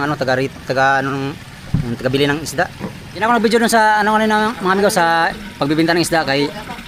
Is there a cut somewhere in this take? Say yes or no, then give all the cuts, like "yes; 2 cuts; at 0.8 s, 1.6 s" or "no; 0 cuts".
yes; 1 cut; at 3.2 s